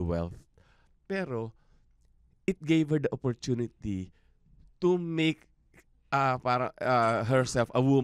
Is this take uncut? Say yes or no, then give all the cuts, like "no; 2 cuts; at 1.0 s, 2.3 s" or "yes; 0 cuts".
yes; 0 cuts